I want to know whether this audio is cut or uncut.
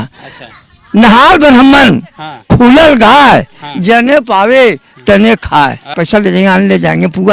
cut